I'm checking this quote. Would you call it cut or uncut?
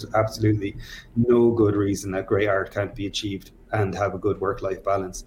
uncut